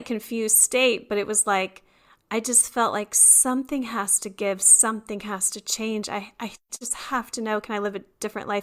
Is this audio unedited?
yes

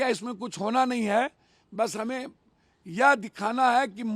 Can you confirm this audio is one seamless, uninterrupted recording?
yes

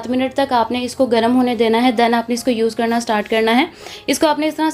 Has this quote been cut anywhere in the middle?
no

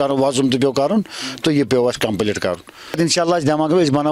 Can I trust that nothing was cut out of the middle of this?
no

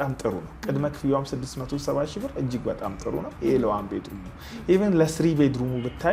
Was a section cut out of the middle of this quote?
no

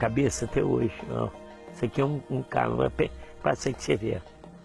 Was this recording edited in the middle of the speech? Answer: no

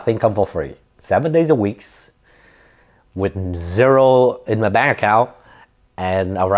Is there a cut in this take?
yes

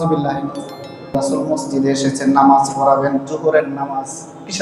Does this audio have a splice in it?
yes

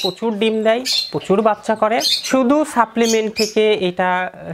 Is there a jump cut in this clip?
yes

